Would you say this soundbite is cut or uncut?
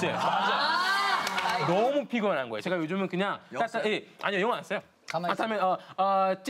cut